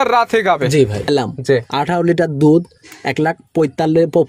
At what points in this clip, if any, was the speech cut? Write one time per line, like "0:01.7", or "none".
0:01.1